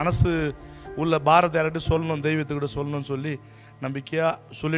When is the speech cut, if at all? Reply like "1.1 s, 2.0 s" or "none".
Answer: none